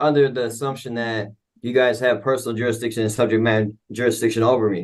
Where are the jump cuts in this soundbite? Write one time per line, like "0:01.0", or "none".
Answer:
none